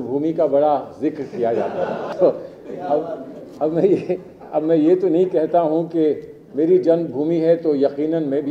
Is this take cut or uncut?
cut